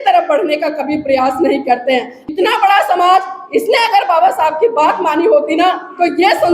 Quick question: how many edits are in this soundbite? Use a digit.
1